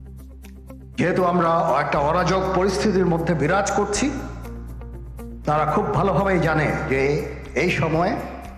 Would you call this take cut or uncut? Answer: cut